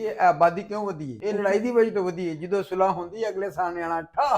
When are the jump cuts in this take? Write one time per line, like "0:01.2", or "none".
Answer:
0:01.2